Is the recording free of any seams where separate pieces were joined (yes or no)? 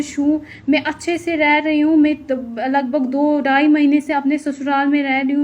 yes